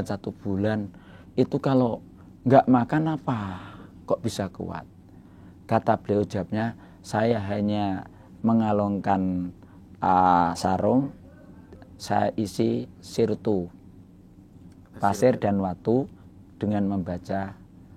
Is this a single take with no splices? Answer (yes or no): yes